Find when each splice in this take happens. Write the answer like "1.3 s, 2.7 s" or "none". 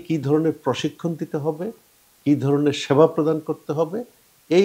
none